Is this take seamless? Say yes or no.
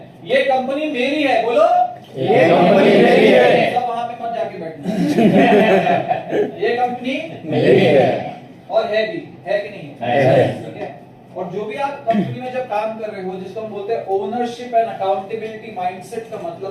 yes